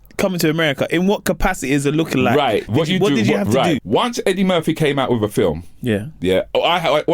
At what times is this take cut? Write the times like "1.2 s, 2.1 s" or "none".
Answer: 3.8 s